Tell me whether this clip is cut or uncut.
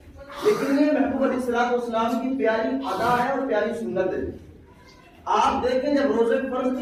uncut